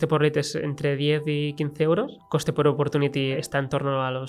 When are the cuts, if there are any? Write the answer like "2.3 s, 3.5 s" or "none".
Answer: 2.2 s, 3.4 s